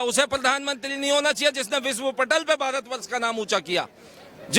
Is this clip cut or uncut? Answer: uncut